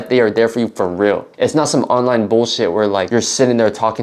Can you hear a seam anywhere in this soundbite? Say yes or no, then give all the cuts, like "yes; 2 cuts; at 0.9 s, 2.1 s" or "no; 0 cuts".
yes; 2 cuts; at 1.3 s, 3.1 s